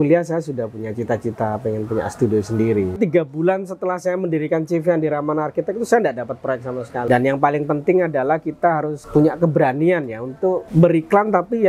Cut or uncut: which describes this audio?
cut